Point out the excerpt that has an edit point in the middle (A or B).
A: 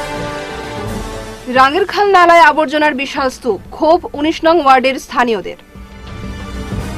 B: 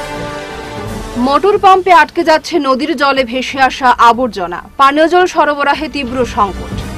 A